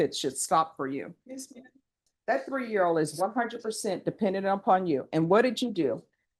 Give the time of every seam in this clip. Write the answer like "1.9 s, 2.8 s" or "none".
2.0 s